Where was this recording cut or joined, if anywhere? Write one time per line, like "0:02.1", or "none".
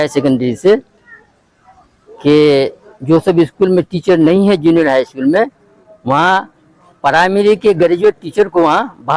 none